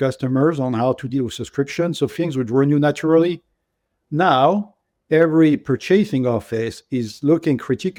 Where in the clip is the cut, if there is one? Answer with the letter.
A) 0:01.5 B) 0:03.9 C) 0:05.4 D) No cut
D